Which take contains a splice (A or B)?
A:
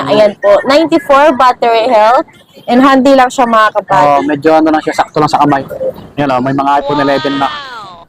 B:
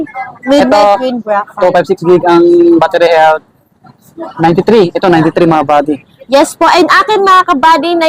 A